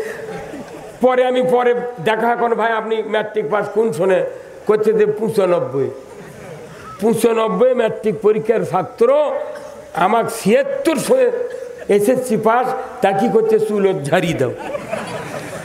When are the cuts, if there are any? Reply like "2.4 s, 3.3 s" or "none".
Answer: none